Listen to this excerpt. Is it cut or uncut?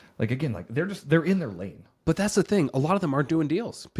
uncut